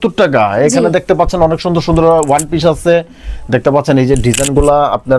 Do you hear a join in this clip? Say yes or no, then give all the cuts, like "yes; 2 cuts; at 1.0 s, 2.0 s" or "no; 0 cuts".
no; 0 cuts